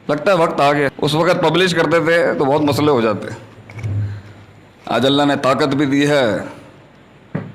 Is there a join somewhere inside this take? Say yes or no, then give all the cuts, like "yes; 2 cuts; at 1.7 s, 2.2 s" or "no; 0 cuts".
yes; 1 cut; at 0.9 s